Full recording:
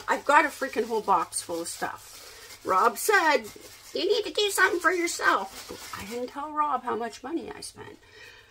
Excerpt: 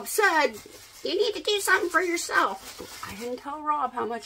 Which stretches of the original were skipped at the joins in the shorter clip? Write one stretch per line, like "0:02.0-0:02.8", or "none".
none